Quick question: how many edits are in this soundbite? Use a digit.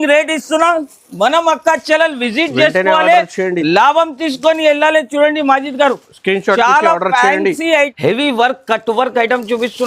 1